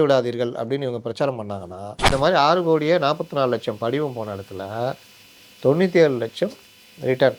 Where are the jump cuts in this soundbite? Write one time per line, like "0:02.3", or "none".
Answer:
0:02.1